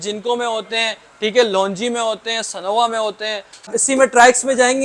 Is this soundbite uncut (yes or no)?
no